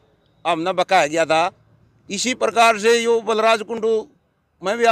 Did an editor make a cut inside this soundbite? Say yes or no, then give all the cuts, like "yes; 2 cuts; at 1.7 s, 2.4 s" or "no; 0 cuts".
no; 0 cuts